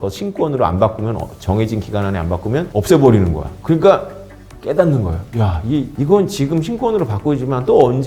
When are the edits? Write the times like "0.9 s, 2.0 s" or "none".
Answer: none